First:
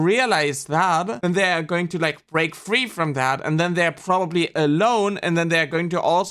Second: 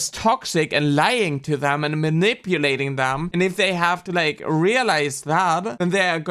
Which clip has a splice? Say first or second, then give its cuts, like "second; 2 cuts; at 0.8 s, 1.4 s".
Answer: second; 1 cut; at 3.3 s